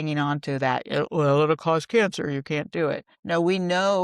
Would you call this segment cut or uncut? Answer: cut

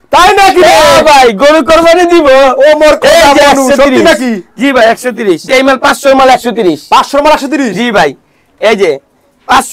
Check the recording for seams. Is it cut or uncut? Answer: cut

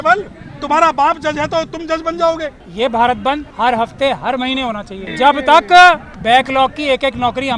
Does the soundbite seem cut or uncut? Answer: cut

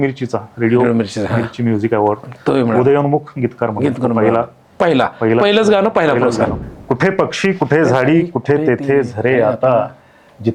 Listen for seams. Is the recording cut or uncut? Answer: cut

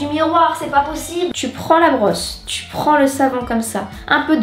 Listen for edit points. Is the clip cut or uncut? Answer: cut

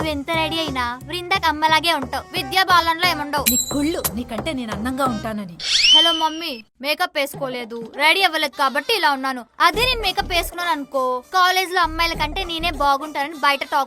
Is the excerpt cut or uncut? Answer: uncut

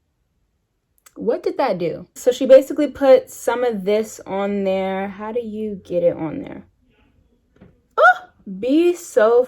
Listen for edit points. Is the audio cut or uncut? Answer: cut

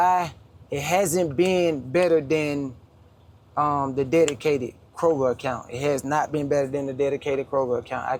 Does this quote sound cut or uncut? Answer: uncut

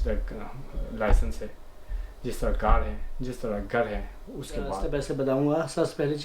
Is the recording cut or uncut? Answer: cut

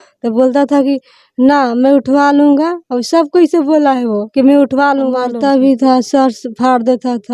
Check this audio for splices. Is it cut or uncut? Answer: cut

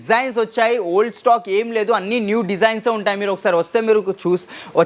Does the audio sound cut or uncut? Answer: uncut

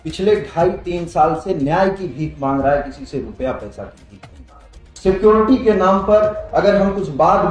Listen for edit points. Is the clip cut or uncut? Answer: uncut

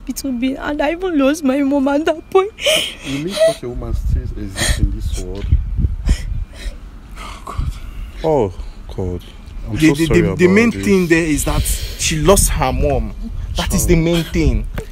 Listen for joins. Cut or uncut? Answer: uncut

